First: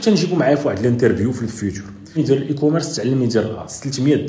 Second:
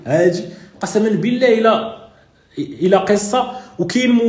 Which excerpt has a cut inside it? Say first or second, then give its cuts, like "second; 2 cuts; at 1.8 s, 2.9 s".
first; 1 cut; at 2.2 s